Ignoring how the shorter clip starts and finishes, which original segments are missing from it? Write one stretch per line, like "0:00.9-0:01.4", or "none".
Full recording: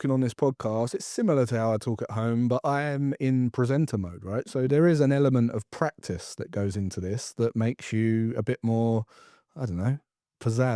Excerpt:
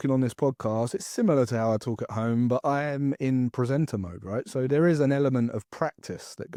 none